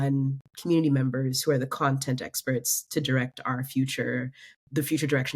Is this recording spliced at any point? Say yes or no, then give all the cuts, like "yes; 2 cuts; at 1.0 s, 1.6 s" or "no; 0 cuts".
yes; 1 cut; at 4.5 s